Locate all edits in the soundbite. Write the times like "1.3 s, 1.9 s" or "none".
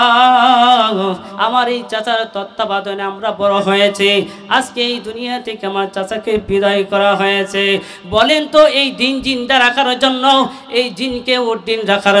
1.3 s